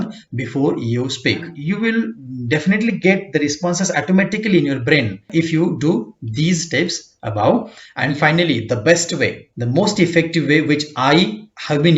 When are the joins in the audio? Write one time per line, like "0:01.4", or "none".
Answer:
0:01.5
0:05.3
0:07.8